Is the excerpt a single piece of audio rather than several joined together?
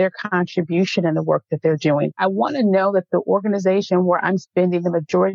no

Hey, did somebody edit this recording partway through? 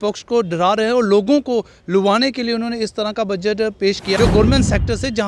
yes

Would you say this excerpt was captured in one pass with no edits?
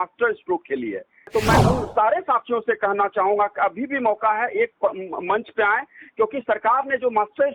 no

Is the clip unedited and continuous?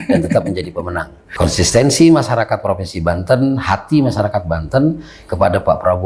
no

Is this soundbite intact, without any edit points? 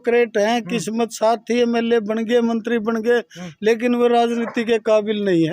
no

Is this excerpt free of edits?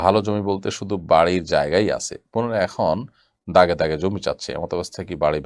yes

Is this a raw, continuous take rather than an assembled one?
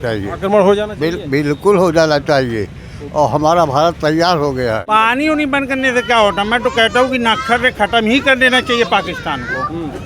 no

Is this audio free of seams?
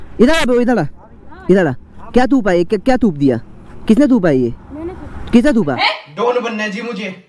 yes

